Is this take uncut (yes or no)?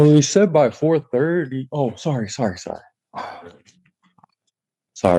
yes